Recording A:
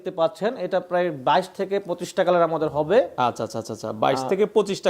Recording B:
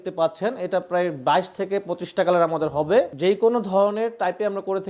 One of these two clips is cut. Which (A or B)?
B